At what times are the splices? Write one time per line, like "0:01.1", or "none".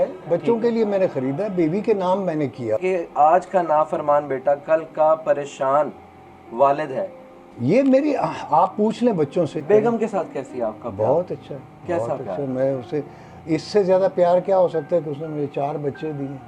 0:02.8
0:09.6

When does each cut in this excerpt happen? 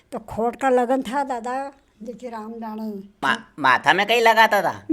0:03.2

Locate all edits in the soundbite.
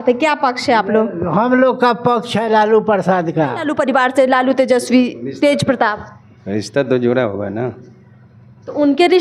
0:03.7

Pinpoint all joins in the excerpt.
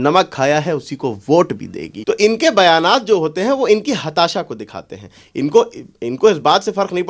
0:01.9

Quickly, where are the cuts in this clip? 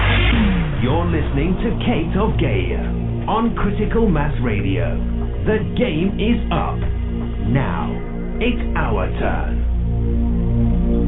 none

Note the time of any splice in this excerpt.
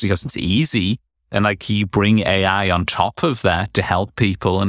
0:01.1

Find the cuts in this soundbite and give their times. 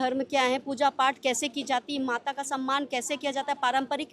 none

